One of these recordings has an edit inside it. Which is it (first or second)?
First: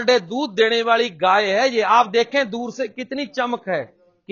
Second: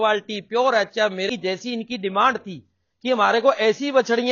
second